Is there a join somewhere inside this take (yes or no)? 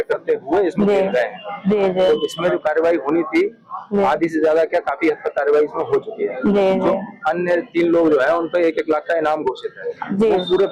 no